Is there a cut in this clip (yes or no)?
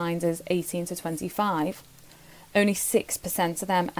no